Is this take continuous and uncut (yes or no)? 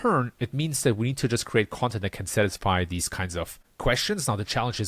no